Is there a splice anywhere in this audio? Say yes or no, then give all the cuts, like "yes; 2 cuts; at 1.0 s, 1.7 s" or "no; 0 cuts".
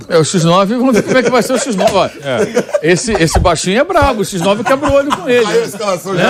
no; 0 cuts